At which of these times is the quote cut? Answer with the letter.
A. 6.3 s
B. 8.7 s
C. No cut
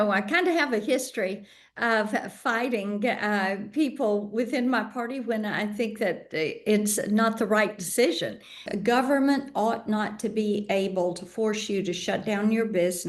B